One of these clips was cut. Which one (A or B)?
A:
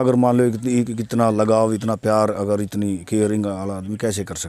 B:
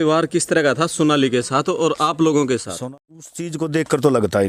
B